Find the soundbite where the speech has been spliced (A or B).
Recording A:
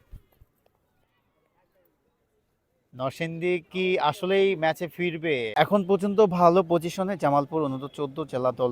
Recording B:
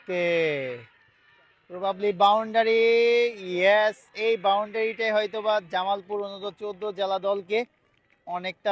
A